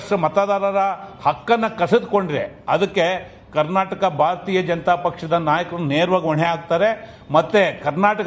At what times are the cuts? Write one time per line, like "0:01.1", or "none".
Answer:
none